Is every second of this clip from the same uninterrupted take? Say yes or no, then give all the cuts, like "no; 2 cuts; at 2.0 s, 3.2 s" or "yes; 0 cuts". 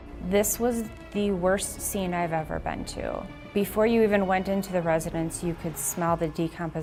yes; 0 cuts